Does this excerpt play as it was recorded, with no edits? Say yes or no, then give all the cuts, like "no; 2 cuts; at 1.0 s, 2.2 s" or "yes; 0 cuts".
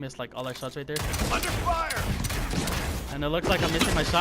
no; 1 cut; at 1.2 s